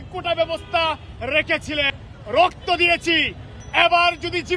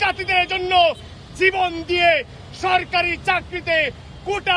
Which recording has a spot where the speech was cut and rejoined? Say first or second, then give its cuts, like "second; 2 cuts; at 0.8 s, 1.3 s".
first; 1 cut; at 1.9 s